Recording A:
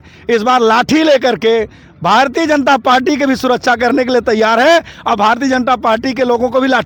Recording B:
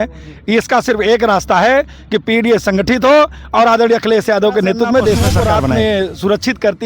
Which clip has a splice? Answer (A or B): B